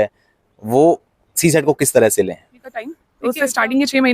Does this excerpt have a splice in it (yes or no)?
yes